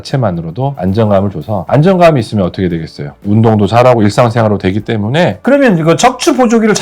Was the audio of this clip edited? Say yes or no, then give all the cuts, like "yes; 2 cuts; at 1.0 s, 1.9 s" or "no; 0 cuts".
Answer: yes; 1 cut; at 5.4 s